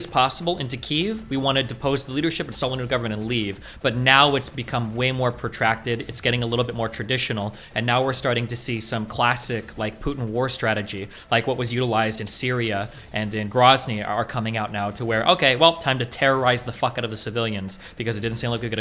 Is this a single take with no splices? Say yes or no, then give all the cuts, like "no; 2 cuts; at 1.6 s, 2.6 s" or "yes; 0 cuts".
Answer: yes; 0 cuts